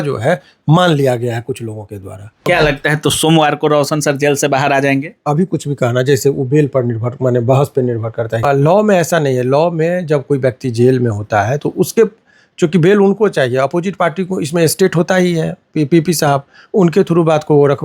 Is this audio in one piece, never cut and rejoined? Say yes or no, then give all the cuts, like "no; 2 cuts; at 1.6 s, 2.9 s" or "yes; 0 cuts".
no; 2 cuts; at 2.5 s, 8.4 s